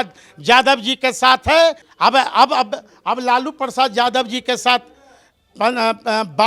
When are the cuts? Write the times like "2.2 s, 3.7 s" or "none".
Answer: 1.9 s